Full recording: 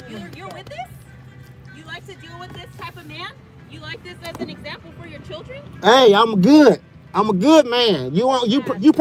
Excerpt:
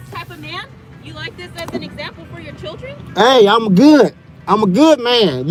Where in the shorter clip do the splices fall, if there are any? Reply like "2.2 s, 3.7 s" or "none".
none